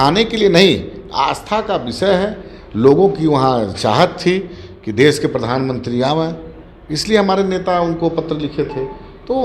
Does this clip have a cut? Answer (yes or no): no